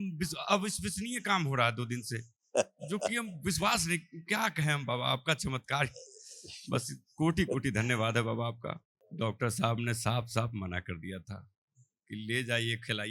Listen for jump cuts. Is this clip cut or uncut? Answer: cut